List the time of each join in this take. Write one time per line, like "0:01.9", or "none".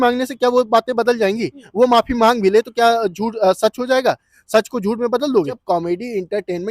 0:05.6